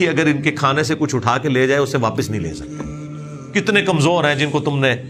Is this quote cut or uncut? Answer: uncut